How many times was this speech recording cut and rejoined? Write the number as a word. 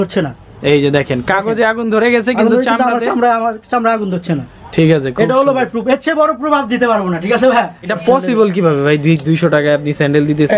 one